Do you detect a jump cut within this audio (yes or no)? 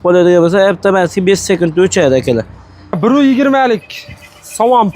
yes